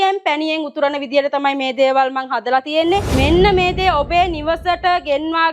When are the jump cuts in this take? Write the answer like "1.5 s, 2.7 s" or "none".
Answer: 3.1 s

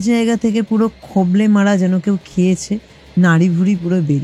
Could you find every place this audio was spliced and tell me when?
none

